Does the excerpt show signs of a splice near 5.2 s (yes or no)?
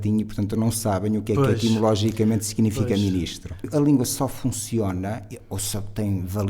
no